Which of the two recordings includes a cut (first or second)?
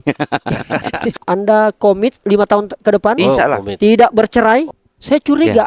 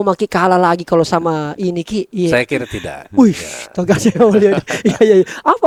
first